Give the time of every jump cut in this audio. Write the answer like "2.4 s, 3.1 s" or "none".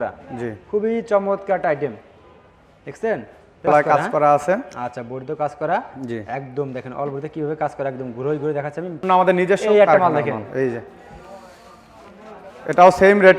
3.7 s, 9.0 s